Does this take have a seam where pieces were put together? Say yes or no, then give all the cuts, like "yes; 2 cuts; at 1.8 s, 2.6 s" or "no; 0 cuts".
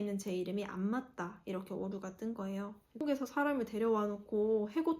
yes; 1 cut; at 3.0 s